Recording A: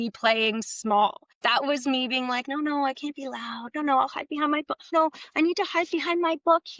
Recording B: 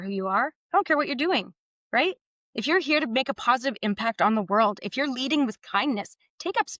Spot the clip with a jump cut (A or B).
A